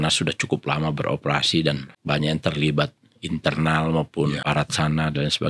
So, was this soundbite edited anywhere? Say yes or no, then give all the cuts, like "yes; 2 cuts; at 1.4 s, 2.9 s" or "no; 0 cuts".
yes; 2 cuts; at 1.9 s, 4.4 s